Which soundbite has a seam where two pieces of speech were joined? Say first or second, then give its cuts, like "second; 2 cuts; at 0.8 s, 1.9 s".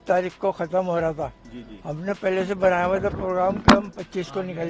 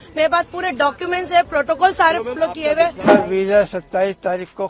second; 1 cut; at 3.1 s